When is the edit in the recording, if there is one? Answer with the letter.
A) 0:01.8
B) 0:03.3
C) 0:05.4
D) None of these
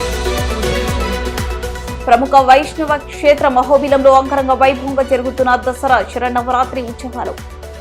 A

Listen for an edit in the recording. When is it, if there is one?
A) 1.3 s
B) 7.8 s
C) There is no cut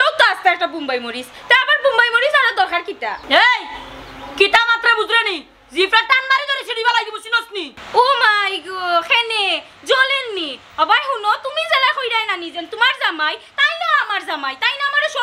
B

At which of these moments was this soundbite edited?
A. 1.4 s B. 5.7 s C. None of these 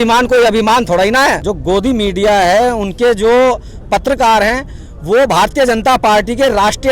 A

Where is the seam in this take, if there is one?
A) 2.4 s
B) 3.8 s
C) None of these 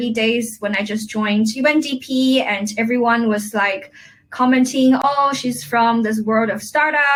C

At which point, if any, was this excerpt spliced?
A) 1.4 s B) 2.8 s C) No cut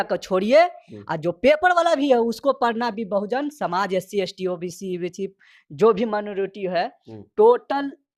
C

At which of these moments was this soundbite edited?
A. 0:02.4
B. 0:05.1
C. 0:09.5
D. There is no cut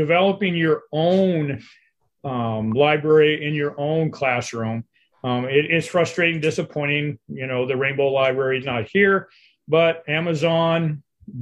D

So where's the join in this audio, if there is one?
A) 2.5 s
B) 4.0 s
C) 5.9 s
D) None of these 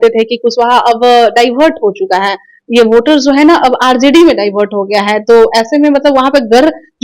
D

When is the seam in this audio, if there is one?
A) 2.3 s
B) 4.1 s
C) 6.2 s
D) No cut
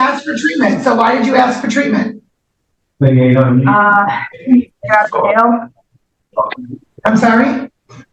D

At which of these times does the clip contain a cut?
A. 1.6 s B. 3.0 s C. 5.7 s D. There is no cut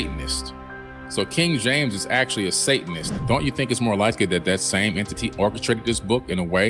B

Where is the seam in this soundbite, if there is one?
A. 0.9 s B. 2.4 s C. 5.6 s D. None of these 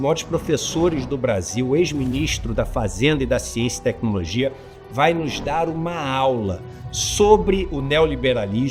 D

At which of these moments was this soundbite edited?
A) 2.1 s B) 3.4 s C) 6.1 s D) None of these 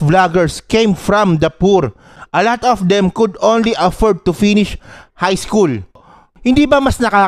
C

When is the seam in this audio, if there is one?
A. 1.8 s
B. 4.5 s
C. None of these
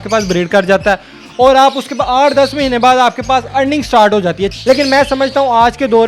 B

